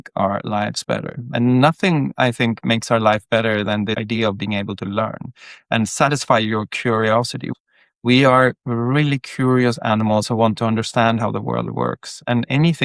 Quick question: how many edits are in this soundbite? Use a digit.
1